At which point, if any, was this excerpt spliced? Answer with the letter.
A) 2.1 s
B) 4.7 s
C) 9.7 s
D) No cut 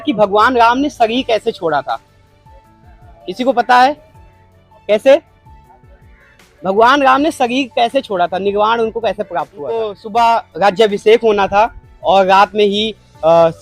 C